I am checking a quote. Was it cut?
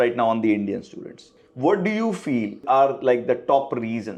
no; 0 cuts

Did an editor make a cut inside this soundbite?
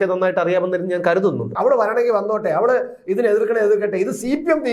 yes; 1 cut; at 1.5 s

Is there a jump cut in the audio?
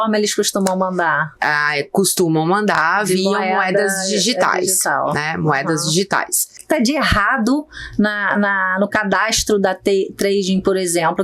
yes; 1 cut; at 6.6 s

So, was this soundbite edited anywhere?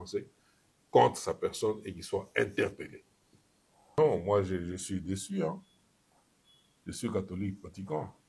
yes; 1 cut; at 4.0 s

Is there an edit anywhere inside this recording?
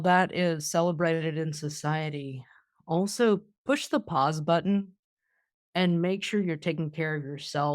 yes; 1 cut; at 3.5 s

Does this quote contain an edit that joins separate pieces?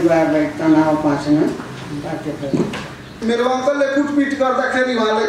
yes; 1 cut; at 3.1 s

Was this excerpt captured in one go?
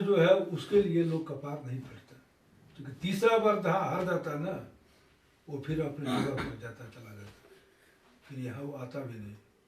yes; 0 cuts

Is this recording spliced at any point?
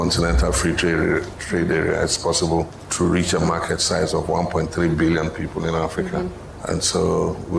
yes; 2 cuts; at 2.8 s, 6.5 s

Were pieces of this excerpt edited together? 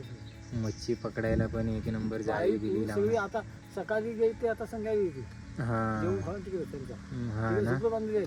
no; 0 cuts

